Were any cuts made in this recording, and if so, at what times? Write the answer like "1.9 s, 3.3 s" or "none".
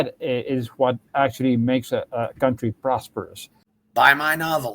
3.6 s